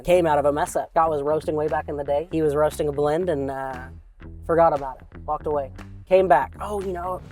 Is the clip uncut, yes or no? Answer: no